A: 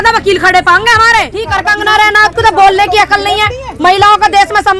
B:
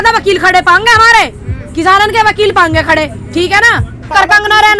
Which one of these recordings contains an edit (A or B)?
A